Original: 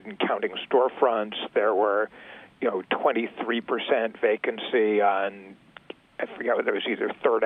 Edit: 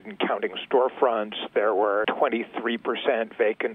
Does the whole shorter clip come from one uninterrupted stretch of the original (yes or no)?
no